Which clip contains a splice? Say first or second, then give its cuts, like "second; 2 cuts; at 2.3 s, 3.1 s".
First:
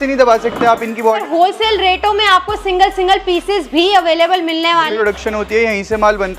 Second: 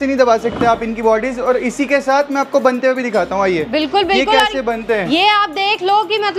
first; 2 cuts; at 1.2 s, 4.9 s